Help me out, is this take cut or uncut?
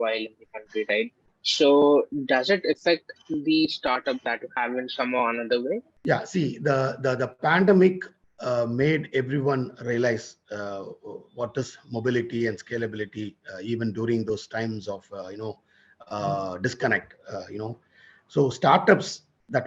cut